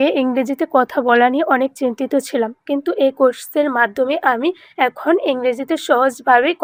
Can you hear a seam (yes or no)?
no